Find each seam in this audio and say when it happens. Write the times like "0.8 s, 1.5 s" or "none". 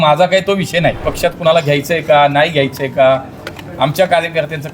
1.0 s